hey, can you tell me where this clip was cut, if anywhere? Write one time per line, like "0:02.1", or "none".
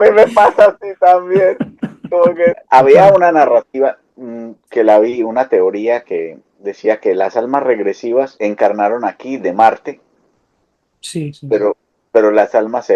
0:02.6
0:08.3